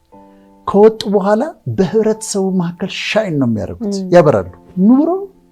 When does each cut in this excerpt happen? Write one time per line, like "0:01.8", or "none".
0:04.6